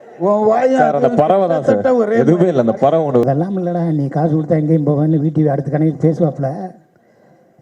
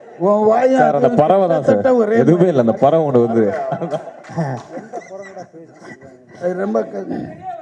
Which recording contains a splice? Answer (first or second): first